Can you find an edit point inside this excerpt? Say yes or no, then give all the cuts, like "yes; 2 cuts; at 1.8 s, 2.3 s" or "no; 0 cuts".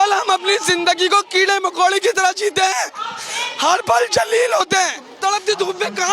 yes; 1 cut; at 5.0 s